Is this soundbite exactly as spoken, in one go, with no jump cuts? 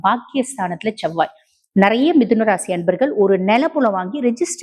yes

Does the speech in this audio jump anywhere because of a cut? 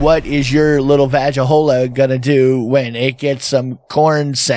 no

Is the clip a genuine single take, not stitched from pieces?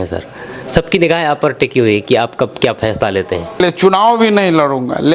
no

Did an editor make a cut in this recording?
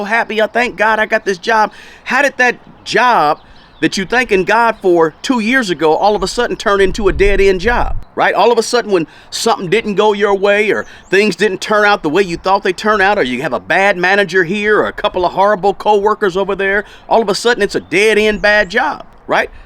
no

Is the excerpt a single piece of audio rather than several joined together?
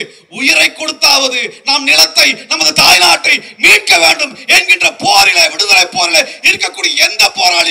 yes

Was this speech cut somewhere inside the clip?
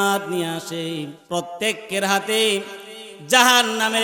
yes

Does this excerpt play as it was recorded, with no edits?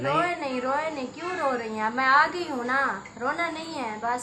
yes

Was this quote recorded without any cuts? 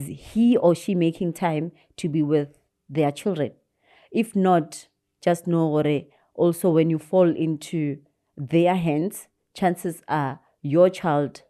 yes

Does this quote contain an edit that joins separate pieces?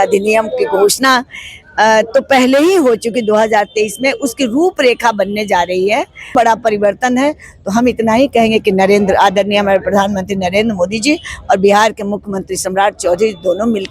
yes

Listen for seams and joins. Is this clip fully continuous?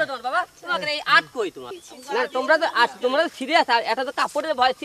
no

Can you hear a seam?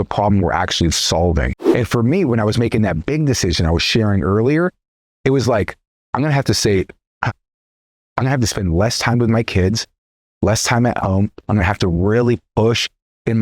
yes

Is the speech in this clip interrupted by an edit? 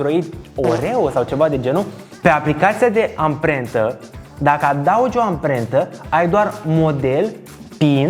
yes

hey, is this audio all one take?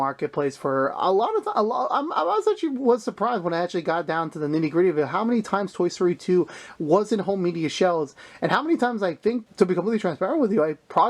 no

